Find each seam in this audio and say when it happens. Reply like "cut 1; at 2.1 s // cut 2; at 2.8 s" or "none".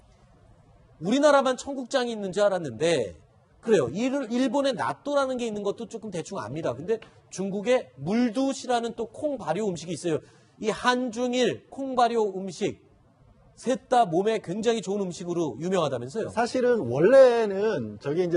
cut 1; at 17.0 s